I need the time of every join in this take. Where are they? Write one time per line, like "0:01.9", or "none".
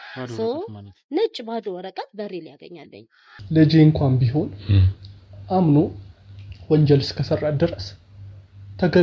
0:03.4

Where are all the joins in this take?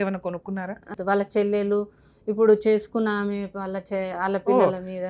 0:00.9

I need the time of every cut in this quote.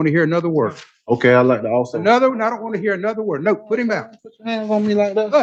none

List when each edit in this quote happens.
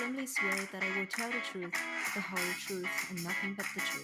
none

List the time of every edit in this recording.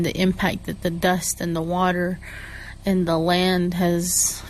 none

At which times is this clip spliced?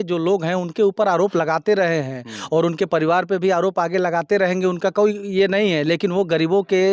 none

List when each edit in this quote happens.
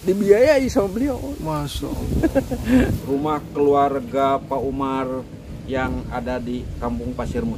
0:03.0

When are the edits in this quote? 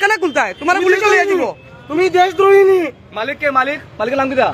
none

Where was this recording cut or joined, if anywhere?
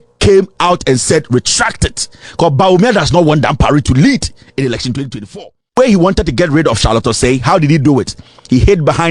0:05.8

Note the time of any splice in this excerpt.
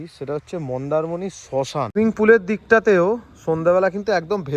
0:01.9

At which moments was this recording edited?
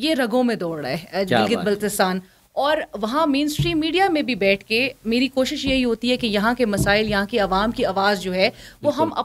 none

